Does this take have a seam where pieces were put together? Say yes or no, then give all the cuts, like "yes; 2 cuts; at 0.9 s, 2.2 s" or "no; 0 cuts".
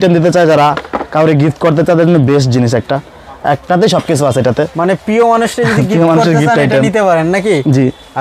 no; 0 cuts